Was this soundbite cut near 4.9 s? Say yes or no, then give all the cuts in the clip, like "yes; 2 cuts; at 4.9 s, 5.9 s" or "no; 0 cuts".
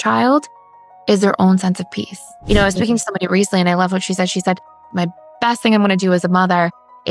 yes; 2 cuts; at 2.3 s, 4.9 s